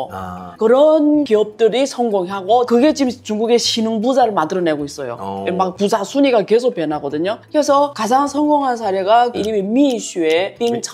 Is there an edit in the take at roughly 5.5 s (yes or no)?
no